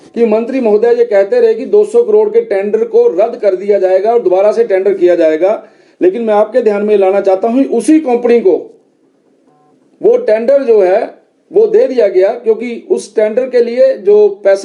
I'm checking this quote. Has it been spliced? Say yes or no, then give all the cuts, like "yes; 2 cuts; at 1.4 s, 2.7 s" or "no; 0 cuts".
no; 0 cuts